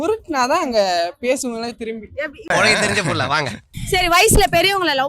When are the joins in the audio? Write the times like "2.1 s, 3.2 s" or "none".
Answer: 2.4 s, 3.7 s